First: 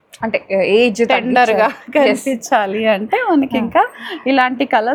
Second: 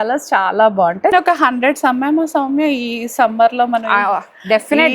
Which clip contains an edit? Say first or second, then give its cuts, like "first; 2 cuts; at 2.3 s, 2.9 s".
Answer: second; 1 cut; at 1.1 s